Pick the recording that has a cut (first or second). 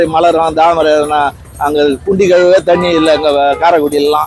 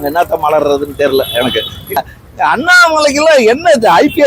second